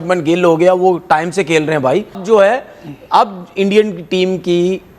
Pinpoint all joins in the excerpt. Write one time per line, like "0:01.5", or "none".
0:02.2